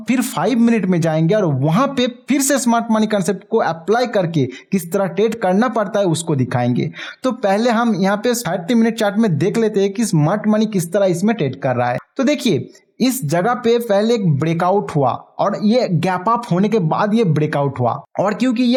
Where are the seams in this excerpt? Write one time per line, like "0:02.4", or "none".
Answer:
none